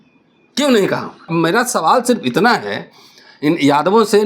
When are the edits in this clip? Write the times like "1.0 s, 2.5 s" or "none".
1.3 s